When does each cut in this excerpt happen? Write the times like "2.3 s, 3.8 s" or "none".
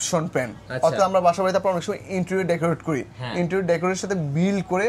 none